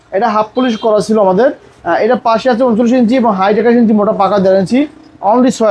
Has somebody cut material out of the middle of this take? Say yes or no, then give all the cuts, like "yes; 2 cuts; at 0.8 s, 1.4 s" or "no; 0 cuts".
no; 0 cuts